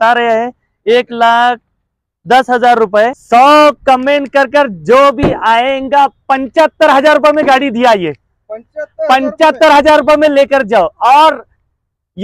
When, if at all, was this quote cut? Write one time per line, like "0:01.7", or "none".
none